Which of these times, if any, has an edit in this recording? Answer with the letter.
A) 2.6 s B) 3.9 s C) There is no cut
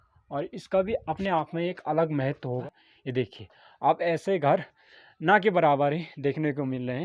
A